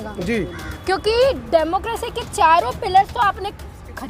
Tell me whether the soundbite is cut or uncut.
uncut